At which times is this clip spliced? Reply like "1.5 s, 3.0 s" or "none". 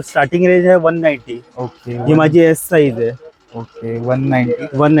none